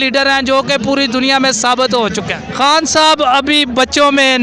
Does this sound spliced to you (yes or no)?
yes